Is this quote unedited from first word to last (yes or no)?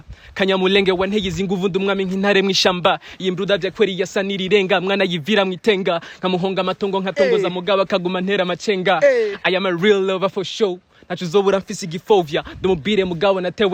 yes